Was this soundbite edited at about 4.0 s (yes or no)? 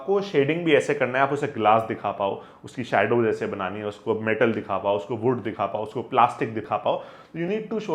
no